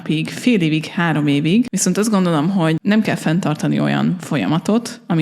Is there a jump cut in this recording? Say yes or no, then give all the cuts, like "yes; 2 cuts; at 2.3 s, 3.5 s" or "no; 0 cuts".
yes; 2 cuts; at 1.7 s, 2.8 s